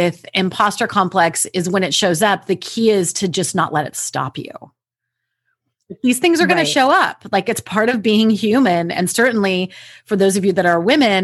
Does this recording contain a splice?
no; 0 cuts

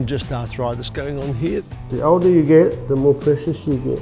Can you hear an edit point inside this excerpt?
yes; 1 cut; at 1.8 s

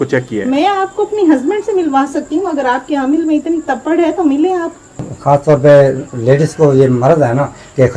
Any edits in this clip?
yes; 1 cut; at 5.1 s

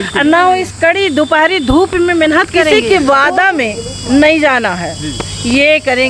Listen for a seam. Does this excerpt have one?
yes; 1 cut; at 2.6 s

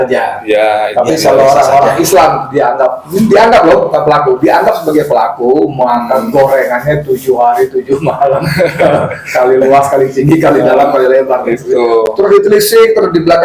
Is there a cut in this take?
no; 0 cuts

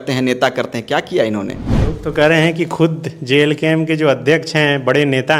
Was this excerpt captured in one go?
no; 1 cut; at 1.7 s

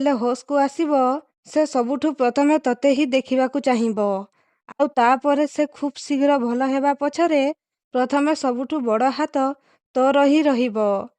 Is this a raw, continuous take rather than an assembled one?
no; 1 cut; at 1.3 s

